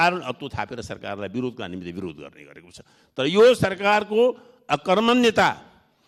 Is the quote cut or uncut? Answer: uncut